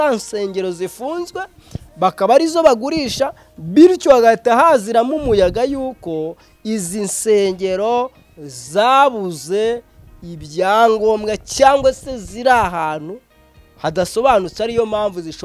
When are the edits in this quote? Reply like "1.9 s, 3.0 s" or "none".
none